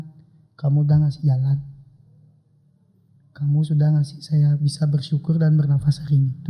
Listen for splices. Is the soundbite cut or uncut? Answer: uncut